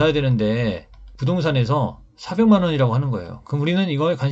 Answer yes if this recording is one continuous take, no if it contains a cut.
yes